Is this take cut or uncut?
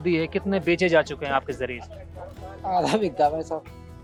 uncut